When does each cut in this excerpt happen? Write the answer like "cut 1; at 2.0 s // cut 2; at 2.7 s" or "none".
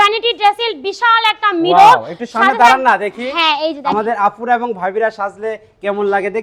none